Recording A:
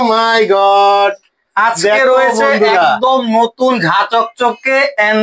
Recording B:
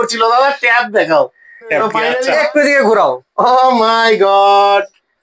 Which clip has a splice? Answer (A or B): B